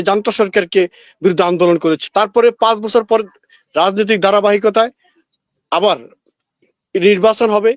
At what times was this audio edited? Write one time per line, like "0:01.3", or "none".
0:02.0